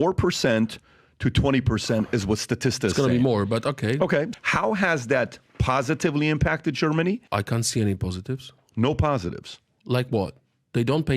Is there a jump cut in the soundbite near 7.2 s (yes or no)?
yes